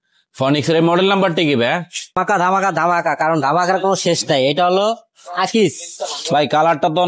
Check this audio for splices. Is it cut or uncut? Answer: cut